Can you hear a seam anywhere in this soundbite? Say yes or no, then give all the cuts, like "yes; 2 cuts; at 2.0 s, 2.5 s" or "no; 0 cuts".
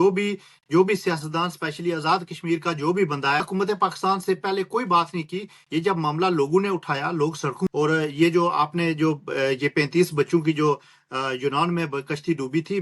yes; 2 cuts; at 3.4 s, 7.7 s